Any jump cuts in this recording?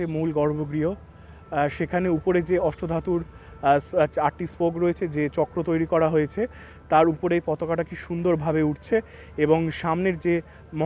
no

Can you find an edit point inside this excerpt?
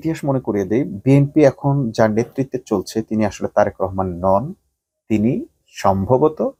no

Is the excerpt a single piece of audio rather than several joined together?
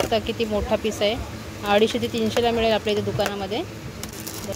yes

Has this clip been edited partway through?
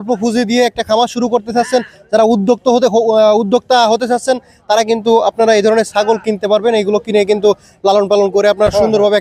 no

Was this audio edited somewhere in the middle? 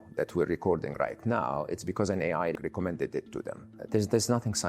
yes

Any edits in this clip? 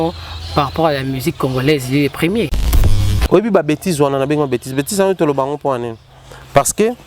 yes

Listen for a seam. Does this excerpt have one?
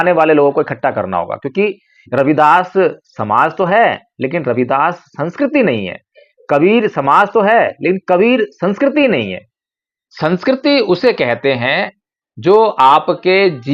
no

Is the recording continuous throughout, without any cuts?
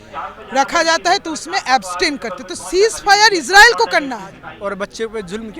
no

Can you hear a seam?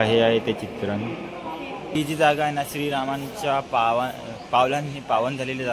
no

